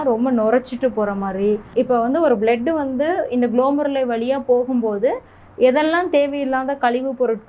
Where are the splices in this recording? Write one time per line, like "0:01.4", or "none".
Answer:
0:01.7